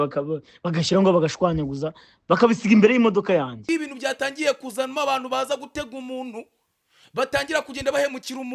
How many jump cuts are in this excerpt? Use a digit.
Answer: 1